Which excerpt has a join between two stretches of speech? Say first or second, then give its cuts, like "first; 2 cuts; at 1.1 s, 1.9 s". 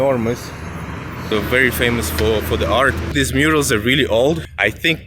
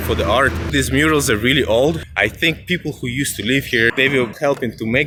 first; 1 cut; at 1.3 s